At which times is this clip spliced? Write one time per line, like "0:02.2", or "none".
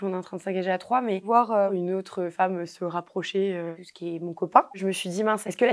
0:01.2
0:04.7

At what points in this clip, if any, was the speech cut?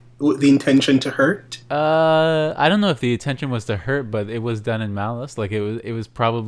0:01.5

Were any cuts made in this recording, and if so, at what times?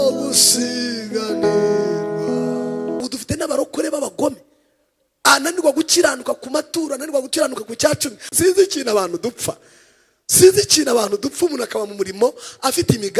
0:03.0
0:08.3

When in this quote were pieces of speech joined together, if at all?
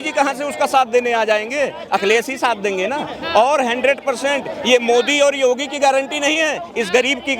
none

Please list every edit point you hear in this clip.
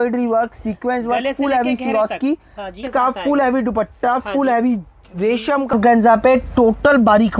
0:02.8
0:05.7

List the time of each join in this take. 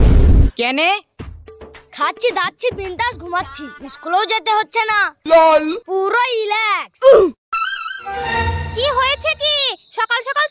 0:08.2

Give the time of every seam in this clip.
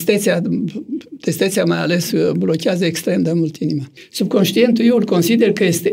0:04.0

